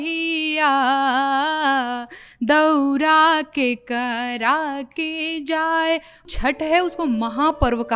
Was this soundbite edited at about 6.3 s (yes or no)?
yes